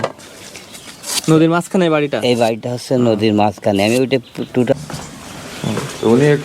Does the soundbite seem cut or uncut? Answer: cut